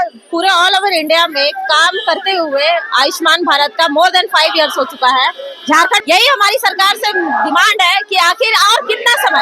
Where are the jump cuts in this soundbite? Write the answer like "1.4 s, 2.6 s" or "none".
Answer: 6.0 s